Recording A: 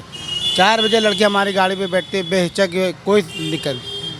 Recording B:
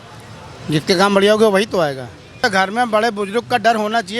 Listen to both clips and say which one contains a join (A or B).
B